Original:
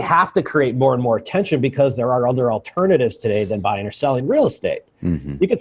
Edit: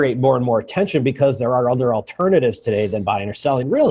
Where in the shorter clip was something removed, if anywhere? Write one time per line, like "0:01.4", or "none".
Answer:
none